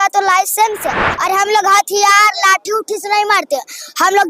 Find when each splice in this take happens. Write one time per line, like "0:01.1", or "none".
0:00.9